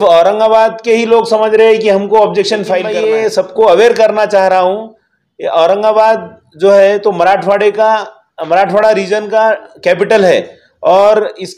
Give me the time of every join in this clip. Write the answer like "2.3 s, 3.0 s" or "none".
2.9 s